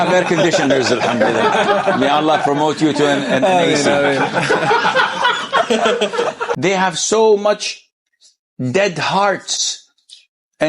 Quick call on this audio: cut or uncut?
cut